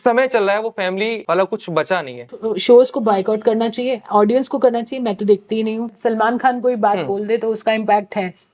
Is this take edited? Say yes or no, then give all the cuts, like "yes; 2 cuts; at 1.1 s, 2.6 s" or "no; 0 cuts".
yes; 3 cuts; at 1.2 s, 2.5 s, 5.9 s